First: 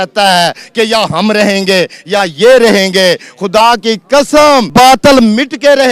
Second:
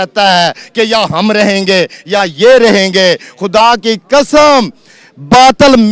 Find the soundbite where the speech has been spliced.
first; 1 cut; at 4.7 s

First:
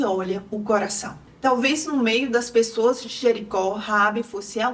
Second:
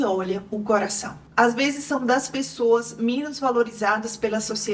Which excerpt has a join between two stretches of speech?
second; 1 cut; at 1.2 s

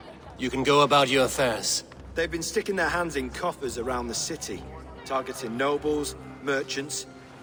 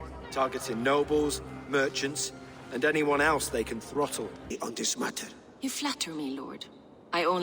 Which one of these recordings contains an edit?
second; 1 cut; at 4.5 s

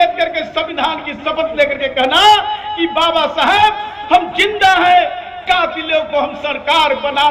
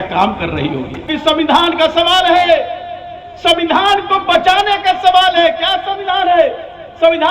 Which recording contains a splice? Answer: second; 1 cut; at 1.1 s

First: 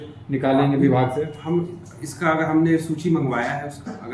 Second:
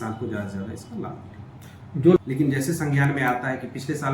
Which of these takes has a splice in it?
second; 1 cut; at 2.2 s

